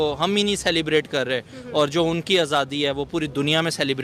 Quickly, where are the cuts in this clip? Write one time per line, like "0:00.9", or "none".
none